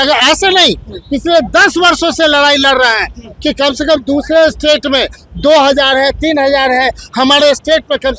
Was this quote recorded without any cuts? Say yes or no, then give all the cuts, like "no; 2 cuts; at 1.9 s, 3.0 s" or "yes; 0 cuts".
yes; 0 cuts